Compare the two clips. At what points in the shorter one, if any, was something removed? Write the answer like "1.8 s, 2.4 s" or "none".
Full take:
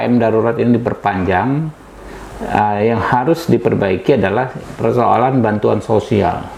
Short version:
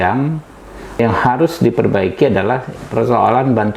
1.0 s